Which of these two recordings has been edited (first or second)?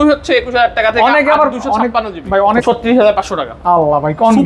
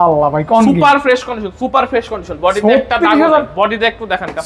first